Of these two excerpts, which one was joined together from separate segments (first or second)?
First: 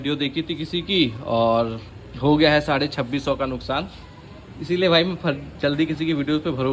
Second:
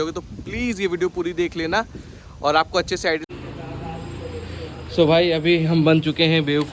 second